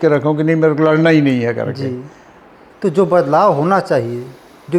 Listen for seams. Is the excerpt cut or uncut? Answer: cut